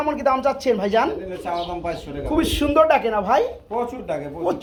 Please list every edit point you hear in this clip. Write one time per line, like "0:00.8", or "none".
none

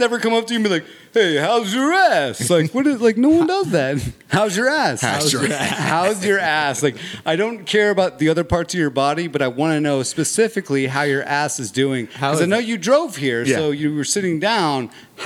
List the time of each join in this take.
none

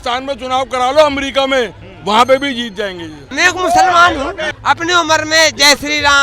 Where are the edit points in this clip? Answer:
0:03.2
0:04.4

